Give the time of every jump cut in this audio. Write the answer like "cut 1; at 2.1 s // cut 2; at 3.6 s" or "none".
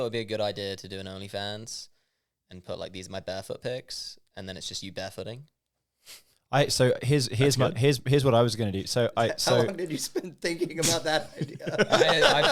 none